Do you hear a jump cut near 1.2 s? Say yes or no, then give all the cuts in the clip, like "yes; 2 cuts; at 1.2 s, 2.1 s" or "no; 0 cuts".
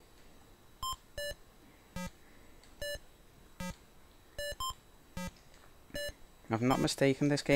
yes; 1 cut; at 1.2 s